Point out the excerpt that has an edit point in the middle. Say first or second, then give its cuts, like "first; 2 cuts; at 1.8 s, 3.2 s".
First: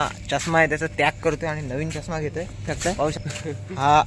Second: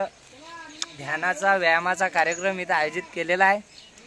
first; 1 cut; at 3.1 s